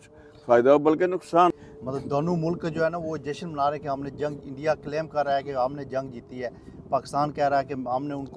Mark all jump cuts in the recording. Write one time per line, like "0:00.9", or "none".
0:01.5